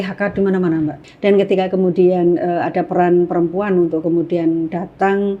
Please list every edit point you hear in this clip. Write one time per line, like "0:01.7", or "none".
0:01.0

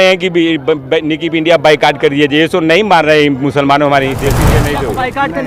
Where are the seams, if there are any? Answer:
0:04.5

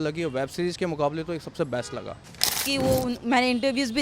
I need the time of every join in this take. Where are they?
0:02.6

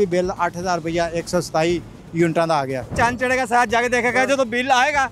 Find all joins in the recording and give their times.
0:02.9

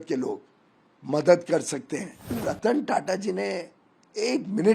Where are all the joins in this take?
0:02.4

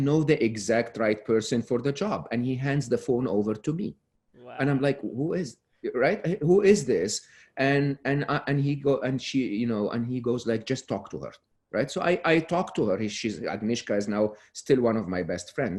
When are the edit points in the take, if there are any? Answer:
none

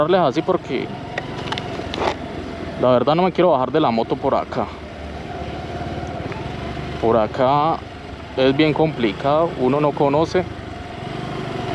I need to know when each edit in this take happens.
none

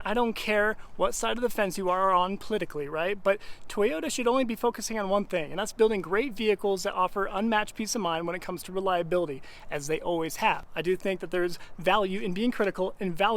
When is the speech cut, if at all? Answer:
0:10.7

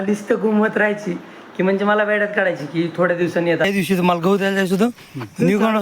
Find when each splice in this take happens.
0:03.7

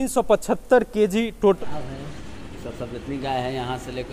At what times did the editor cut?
0:01.6

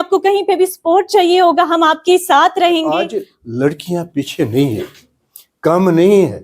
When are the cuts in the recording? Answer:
0:02.9

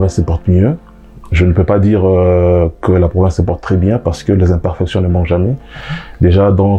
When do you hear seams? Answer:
none

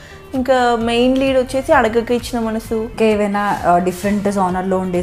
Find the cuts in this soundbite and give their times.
0:02.9

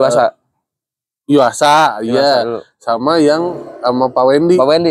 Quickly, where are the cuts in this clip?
none

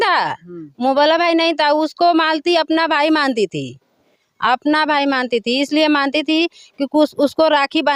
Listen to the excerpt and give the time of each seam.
none

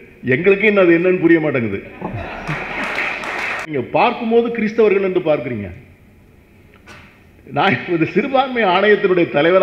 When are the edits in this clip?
0:03.7

